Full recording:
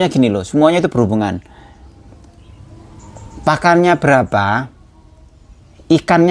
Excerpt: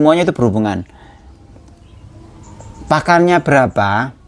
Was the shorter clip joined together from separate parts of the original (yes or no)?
no